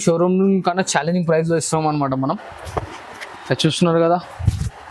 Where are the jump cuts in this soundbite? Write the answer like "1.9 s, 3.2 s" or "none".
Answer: none